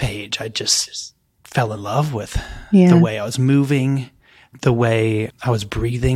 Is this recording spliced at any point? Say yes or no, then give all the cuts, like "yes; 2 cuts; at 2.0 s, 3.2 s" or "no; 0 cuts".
yes; 2 cuts; at 4.4 s, 5.3 s